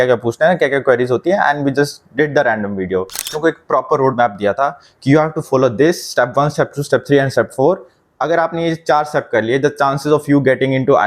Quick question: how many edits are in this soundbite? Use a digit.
1